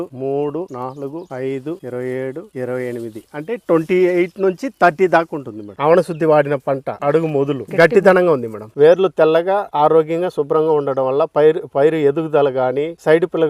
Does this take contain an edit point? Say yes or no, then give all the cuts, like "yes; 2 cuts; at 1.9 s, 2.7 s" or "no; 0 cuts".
yes; 3 cuts; at 1.8 s, 5.7 s, 8.7 s